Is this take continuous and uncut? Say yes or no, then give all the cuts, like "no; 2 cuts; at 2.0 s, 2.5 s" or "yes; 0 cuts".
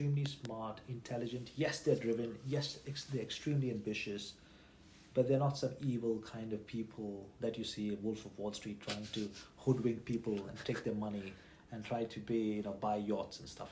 yes; 0 cuts